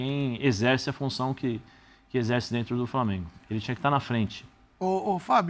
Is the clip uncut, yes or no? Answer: yes